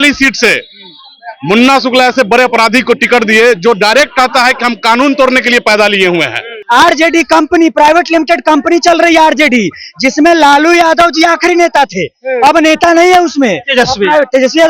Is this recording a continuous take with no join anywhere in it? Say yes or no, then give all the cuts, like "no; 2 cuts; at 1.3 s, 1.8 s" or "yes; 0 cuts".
no; 1 cut; at 6.5 s